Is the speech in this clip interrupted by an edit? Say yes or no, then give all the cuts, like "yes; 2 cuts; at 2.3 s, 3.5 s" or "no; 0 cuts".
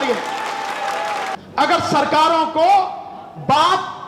yes; 1 cut; at 1.3 s